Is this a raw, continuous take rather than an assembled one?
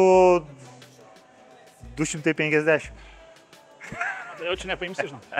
yes; 0 cuts

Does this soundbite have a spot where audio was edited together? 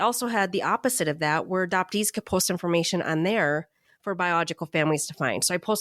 no; 0 cuts

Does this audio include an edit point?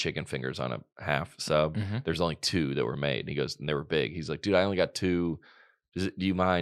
no; 0 cuts

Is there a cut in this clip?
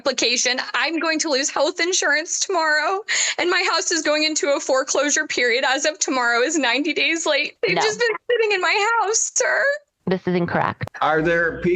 yes; 2 cuts; at 7.5 s, 10.8 s

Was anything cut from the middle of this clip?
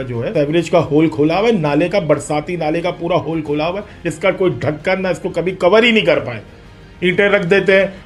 no; 0 cuts

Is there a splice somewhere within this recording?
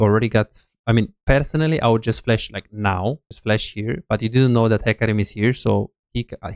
yes; 1 cut; at 3.3 s

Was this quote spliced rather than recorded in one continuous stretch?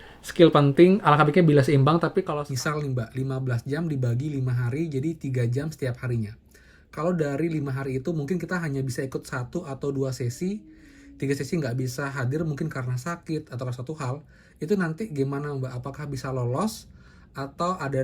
yes; 1 cut; at 2.3 s

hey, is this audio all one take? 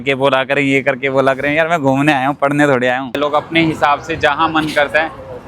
no; 1 cut; at 3.2 s

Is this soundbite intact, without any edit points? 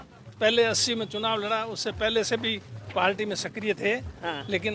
yes; 0 cuts

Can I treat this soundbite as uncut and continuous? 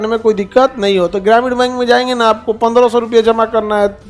yes; 0 cuts

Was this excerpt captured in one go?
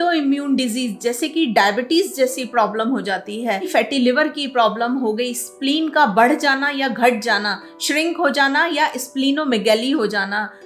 no; 1 cut; at 3.7 s

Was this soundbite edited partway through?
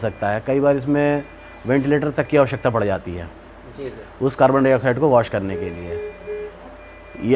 no; 0 cuts

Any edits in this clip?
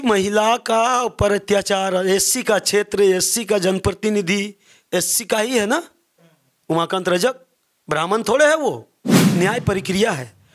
yes; 1 cut; at 9.1 s

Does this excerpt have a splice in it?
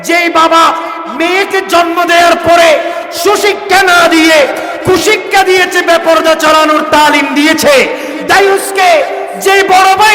no; 0 cuts

